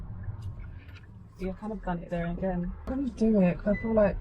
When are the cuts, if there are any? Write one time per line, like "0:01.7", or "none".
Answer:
0:02.9